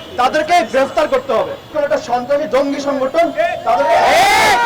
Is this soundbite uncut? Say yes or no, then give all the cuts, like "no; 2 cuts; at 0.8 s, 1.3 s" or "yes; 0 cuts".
no; 1 cut; at 1.7 s